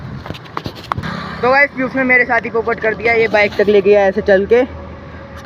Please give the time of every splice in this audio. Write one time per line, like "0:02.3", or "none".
0:01.0